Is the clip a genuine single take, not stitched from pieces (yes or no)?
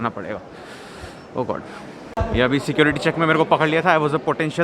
no